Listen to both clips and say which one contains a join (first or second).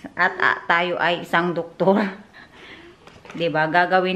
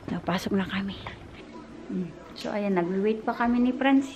second